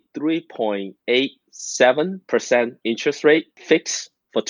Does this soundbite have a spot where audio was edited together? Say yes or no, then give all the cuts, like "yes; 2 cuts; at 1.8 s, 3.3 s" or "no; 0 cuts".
yes; 3 cuts; at 0.9 s, 2.2 s, 3.5 s